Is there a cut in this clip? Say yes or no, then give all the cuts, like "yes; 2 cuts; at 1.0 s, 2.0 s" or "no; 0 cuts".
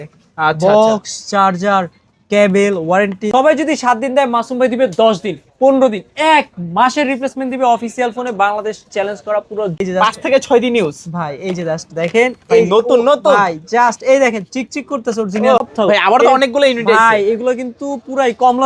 yes; 3 cuts; at 3.2 s, 9.7 s, 15.6 s